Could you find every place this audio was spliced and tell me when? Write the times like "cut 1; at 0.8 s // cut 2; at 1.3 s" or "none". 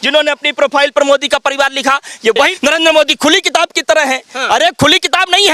cut 1; at 2.4 s